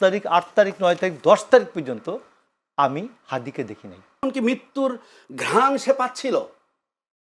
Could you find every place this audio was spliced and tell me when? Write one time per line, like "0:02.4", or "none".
0:04.2